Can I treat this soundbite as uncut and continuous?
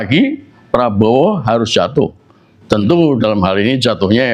yes; 0 cuts

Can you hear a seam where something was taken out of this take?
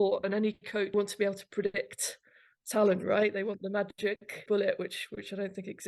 yes; 2 cuts; at 0.9 s, 4.4 s

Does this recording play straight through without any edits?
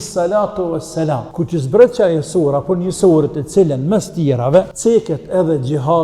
no; 2 cuts; at 1.3 s, 4.7 s

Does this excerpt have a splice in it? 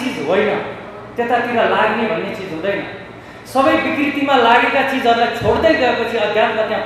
no; 0 cuts

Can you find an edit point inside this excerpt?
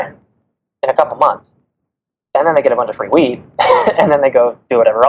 no; 0 cuts

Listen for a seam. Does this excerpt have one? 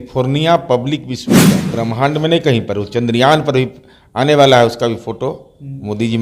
yes; 1 cut; at 1.6 s

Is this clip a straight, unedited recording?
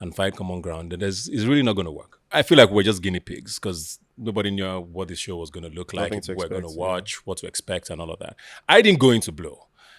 no; 1 cut; at 2.1 s

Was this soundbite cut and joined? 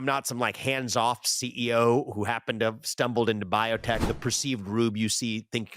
yes; 1 cut; at 4.0 s

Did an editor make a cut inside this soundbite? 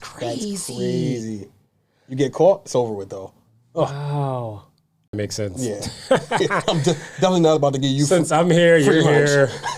yes; 1 cut; at 5.2 s

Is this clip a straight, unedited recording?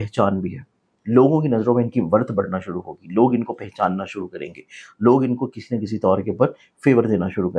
yes; 0 cuts

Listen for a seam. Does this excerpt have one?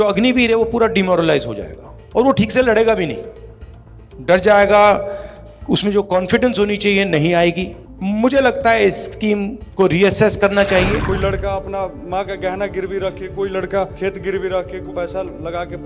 yes; 3 cuts; at 11.1 s, 13.9 s, 14.9 s

